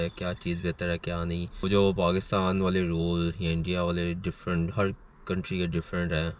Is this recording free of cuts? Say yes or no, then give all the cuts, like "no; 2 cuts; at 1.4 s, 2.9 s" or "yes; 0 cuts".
no; 1 cut; at 1.6 s